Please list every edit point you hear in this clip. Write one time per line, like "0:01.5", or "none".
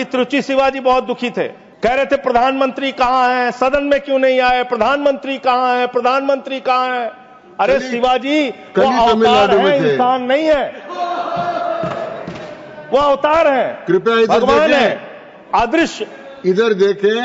0:01.6